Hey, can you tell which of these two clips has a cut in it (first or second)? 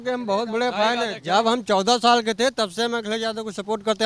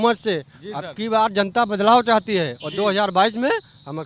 first